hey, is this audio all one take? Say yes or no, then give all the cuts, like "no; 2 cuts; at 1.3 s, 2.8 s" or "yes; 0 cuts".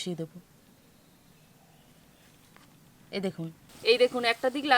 no; 1 cut; at 3.7 s